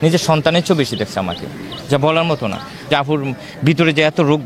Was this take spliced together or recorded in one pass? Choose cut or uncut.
cut